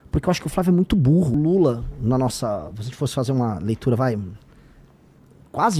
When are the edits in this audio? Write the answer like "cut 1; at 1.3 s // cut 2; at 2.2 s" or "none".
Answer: cut 1; at 1.3 s